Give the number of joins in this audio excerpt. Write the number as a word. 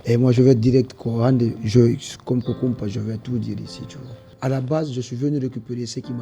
one